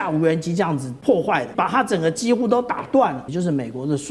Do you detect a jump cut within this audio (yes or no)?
yes